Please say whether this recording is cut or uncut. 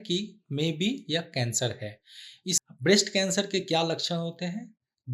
cut